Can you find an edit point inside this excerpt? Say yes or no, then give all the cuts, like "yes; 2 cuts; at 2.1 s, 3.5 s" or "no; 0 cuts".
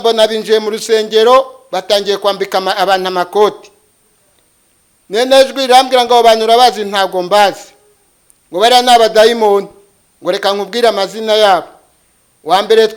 no; 0 cuts